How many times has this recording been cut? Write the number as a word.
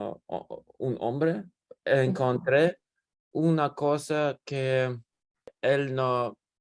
one